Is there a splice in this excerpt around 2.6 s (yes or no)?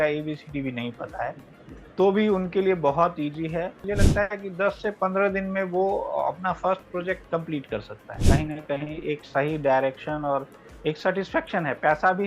no